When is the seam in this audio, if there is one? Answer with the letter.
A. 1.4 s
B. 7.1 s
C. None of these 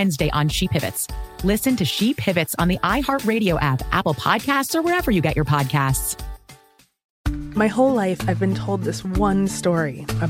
B